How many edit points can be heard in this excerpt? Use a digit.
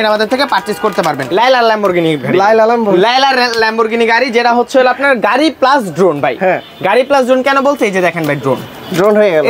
1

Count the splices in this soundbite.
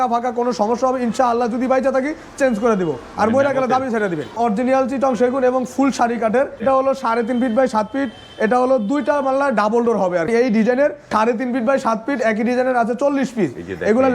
4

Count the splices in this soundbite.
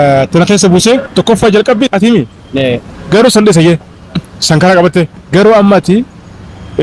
1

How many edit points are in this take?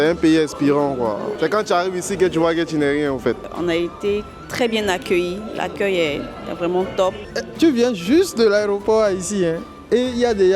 3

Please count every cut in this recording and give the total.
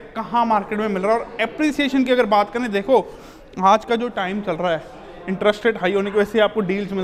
0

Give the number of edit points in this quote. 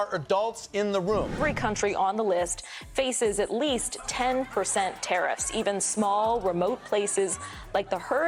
1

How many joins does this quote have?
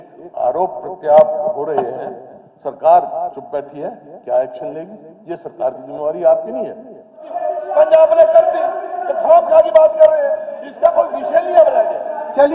1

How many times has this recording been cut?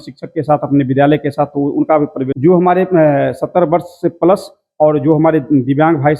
1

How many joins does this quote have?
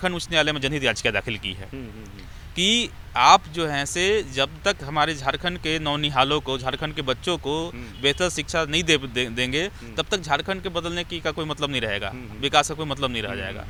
0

